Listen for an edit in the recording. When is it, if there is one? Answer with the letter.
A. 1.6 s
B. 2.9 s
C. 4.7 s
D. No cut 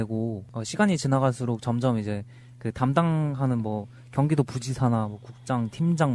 D